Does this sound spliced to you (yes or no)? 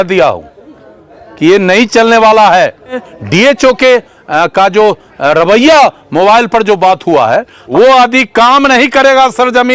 yes